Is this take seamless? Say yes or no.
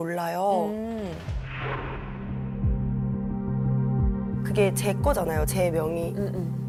yes